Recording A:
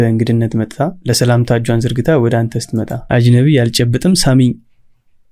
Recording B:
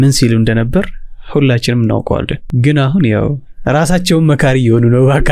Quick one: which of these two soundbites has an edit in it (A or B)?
A